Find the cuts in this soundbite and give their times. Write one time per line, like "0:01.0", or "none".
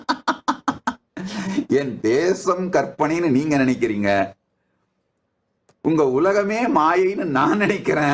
none